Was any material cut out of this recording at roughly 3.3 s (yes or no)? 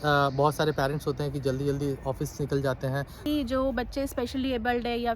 yes